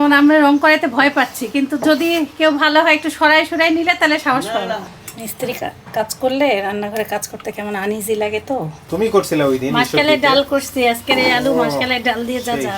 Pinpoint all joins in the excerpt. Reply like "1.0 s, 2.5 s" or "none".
4.8 s, 8.8 s